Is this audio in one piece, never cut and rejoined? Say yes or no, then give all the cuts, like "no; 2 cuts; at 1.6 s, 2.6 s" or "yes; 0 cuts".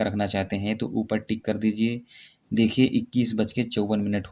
yes; 0 cuts